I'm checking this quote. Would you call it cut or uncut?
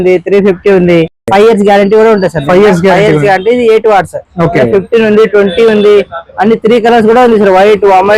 uncut